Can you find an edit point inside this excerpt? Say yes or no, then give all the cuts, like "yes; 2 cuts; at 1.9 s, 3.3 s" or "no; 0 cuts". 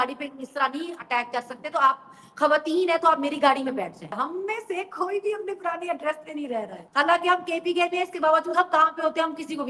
yes; 2 cuts; at 4.2 s, 6.8 s